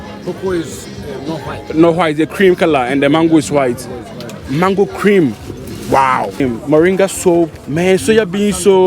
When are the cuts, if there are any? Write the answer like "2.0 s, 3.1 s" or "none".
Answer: 6.4 s, 7.6 s

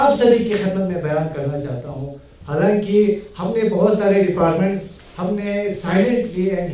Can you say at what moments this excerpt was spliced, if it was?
none

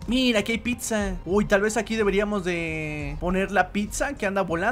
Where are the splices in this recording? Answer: none

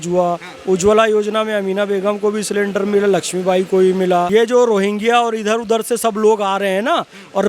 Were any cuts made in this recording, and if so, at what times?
4.3 s

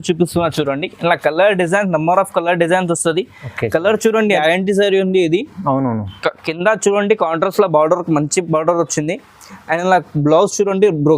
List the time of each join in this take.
4.4 s

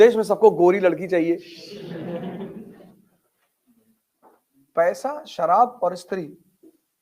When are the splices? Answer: 2.8 s

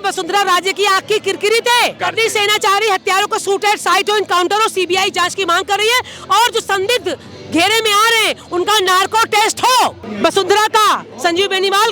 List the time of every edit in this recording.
2.0 s, 10.0 s

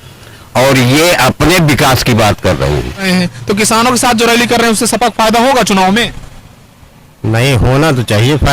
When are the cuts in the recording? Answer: 3.0 s

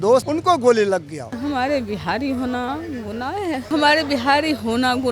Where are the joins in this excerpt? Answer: 1.3 s, 3.7 s

